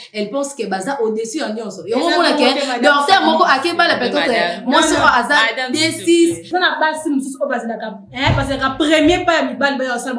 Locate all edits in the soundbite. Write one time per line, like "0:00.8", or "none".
0:06.5